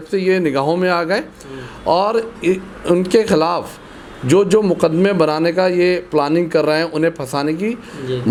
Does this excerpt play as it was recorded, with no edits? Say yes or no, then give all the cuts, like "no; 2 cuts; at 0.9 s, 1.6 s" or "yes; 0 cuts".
yes; 0 cuts